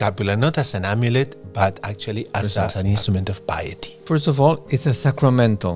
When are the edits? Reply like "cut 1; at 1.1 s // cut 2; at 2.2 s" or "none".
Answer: cut 1; at 2.7 s // cut 2; at 4.0 s